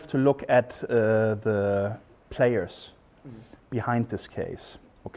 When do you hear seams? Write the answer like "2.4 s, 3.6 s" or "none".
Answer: 2.3 s